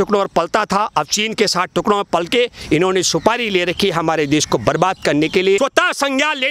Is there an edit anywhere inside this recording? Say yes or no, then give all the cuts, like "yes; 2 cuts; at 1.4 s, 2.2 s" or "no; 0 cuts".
yes; 1 cut; at 5.6 s